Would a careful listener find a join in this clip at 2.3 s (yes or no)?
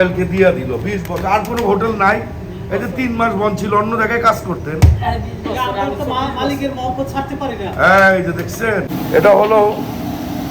no